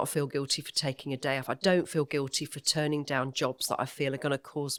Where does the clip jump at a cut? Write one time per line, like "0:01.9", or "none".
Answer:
none